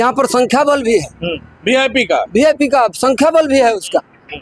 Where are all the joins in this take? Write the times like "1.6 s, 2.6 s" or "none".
none